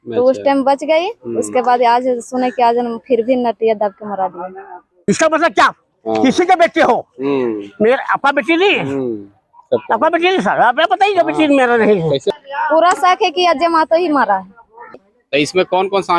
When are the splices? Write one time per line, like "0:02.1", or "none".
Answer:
0:04.9
0:12.3
0:15.0